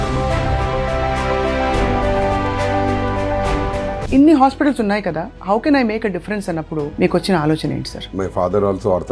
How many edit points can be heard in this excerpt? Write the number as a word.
two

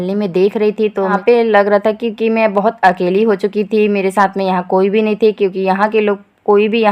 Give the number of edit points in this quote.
one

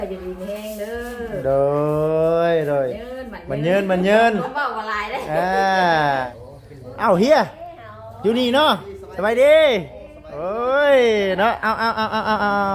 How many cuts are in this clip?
one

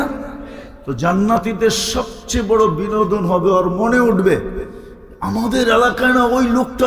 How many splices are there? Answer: zero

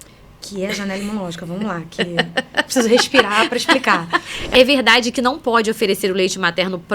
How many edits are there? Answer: one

